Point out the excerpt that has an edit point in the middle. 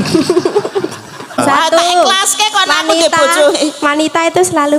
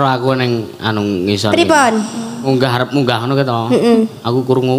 first; 1 cut; at 1.4 s

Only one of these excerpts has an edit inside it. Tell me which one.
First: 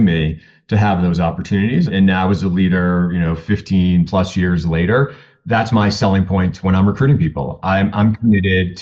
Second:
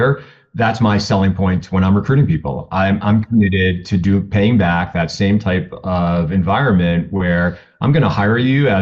first; 1 cut; at 1.9 s

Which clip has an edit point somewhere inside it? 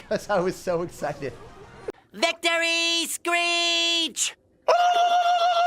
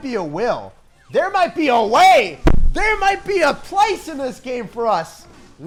first; 1 cut; at 1.7 s

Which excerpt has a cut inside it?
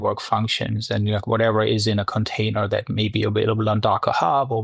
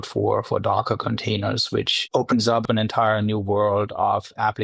second; 1 cut; at 2.6 s

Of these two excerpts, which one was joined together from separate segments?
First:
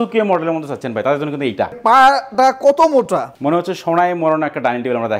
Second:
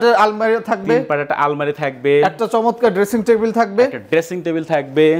first; 2 cuts; at 1.8 s, 3.3 s

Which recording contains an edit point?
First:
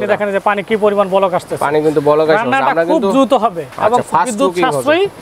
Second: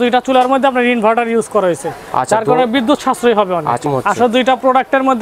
second; 1 cut; at 3.8 s

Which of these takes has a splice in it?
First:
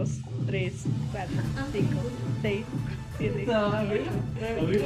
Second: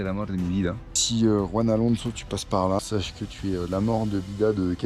second; 2 cuts; at 1.0 s, 2.8 s

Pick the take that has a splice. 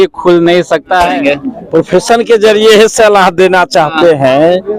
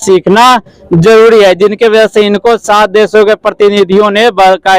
first; 1 cut; at 1.1 s

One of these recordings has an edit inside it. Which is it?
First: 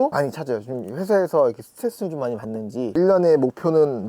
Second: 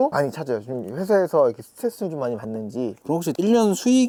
first; 1 cut; at 2.9 s

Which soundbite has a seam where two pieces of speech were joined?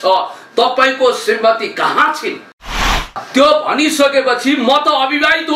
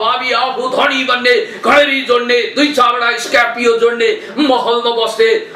first; 1 cut; at 2.9 s

